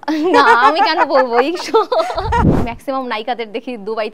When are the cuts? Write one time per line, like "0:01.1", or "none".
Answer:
0:02.5